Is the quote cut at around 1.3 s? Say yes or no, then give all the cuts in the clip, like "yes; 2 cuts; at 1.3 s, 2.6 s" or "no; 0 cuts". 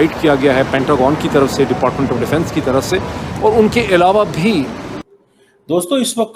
no; 1 cut; at 4.9 s